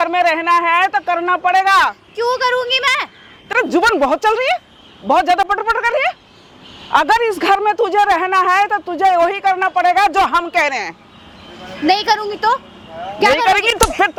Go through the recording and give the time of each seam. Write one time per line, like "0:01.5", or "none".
none